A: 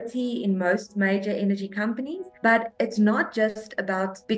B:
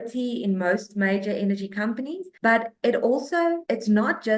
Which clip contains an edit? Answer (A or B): A